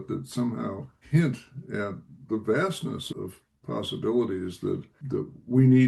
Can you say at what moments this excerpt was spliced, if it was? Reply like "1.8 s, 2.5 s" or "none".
0.9 s, 2.2 s, 3.0 s, 4.9 s